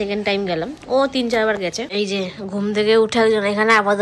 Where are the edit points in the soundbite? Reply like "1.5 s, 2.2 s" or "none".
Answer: 1.8 s